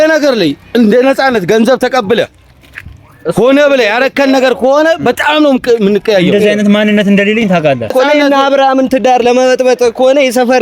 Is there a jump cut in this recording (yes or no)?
yes